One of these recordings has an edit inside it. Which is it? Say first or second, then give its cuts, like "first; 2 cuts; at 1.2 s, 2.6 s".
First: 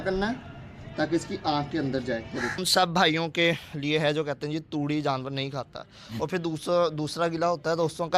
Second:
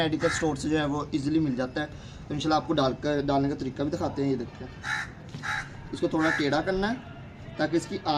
first; 1 cut; at 2.6 s